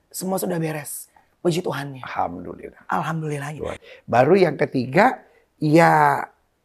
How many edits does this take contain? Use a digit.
1